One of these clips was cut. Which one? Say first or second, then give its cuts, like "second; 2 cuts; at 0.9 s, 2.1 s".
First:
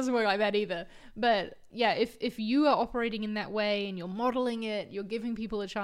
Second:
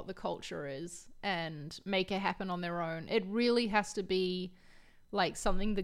first; 1 cut; at 1.6 s